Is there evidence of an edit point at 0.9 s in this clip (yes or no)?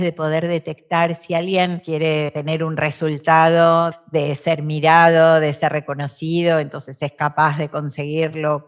no